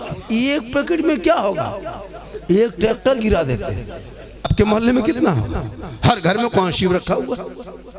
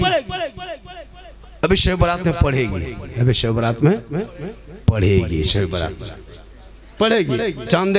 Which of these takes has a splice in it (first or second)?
first